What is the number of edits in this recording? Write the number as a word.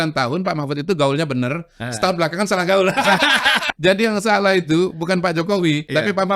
zero